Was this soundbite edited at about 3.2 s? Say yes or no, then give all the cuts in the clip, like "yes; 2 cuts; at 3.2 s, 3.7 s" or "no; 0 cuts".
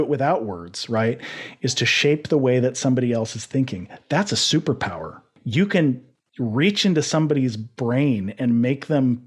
no; 1 cut; at 5.3 s